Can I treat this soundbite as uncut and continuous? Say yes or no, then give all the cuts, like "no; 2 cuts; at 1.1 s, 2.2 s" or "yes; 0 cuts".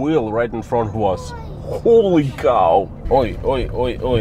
no; 1 cut; at 3.0 s